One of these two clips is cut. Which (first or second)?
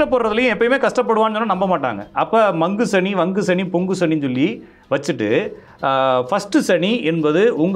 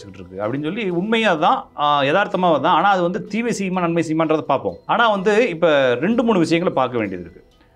second